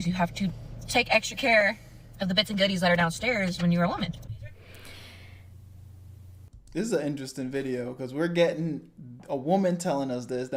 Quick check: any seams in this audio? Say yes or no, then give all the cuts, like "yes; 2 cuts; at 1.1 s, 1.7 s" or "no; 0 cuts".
no; 0 cuts